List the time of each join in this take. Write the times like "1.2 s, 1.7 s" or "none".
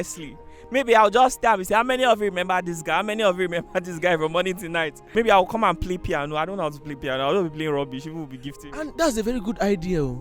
5.0 s